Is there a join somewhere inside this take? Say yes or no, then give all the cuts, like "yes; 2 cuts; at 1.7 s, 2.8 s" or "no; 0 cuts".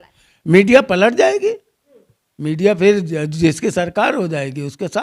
no; 0 cuts